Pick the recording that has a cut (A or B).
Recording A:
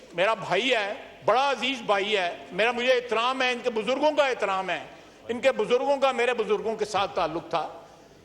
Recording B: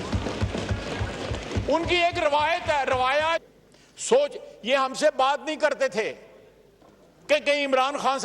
B